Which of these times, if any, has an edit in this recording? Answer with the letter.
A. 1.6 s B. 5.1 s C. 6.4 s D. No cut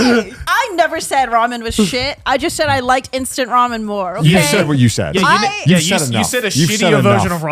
D